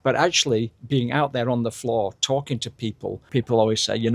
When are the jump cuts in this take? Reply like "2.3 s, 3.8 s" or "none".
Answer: 3.2 s